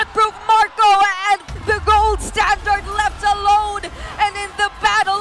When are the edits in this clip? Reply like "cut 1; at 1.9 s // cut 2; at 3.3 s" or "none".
cut 1; at 1.5 s